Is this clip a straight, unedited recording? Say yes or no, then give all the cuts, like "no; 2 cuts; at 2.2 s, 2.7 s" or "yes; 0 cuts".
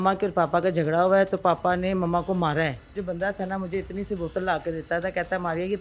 no; 1 cut; at 3.0 s